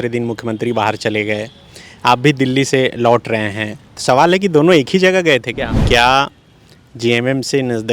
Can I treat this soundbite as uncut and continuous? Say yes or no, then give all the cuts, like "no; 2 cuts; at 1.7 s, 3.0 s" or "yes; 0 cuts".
no; 1 cut; at 5.8 s